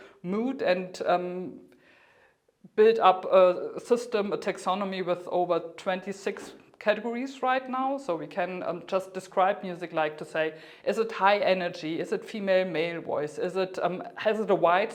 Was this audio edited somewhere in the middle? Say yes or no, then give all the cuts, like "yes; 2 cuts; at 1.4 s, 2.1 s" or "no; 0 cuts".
no; 0 cuts